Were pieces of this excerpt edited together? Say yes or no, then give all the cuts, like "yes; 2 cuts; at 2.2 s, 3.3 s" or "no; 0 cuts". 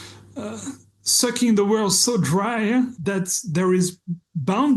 yes; 1 cut; at 2.9 s